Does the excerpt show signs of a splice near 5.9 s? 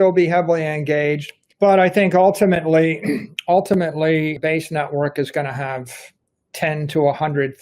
no; 2 cuts; at 3.3 s, 4.4 s

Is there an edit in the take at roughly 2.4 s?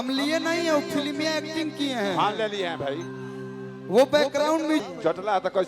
no; 1 cut; at 4.8 s

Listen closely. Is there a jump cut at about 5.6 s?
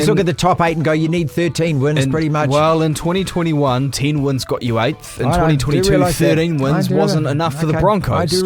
no; 0 cuts

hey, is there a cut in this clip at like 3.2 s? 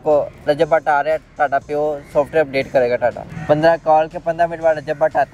yes; 1 cut; at 3.2 s

